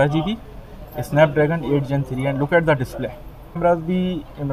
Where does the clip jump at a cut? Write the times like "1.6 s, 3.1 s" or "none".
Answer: 3.6 s